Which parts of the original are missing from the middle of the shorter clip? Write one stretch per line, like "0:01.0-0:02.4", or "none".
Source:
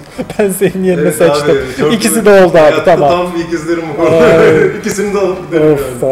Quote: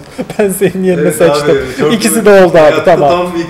none